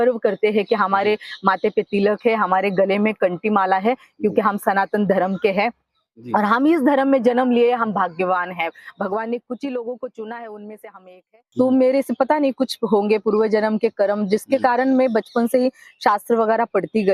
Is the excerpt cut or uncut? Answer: cut